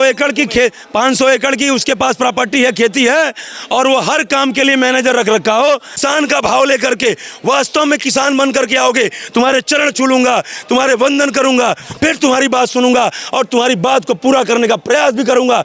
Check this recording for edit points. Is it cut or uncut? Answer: cut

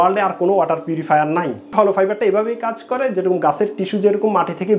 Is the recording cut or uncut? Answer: cut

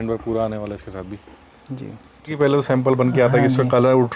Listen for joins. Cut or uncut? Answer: cut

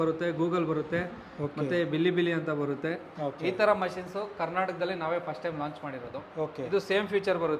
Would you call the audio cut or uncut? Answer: cut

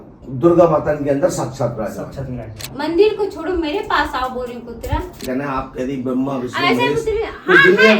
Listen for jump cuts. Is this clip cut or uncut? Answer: cut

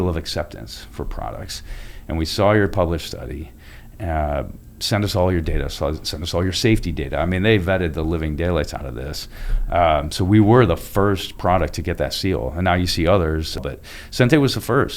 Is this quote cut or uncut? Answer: cut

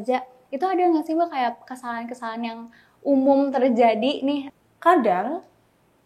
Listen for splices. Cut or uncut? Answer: cut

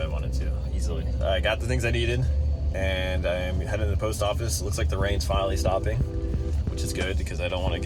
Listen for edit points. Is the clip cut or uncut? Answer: uncut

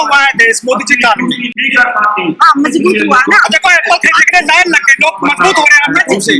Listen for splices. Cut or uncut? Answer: uncut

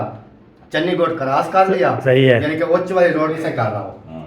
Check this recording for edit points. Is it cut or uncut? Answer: cut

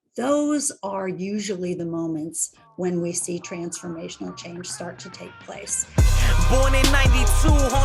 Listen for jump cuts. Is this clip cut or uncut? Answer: cut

